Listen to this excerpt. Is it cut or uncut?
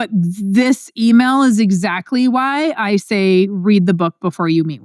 uncut